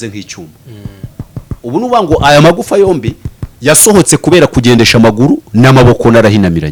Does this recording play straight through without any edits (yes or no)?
yes